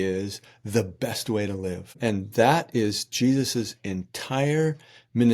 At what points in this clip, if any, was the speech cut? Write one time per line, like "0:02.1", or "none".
0:02.0